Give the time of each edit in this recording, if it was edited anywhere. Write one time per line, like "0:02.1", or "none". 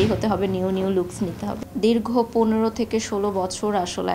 0:01.6